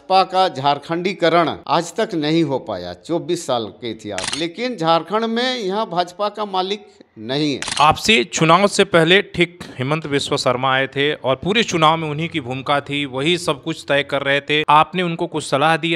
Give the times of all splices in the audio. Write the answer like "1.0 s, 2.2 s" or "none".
4.3 s, 7.7 s, 14.6 s